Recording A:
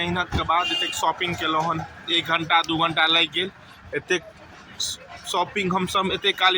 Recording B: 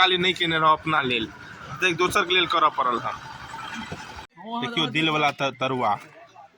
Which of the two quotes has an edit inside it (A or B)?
B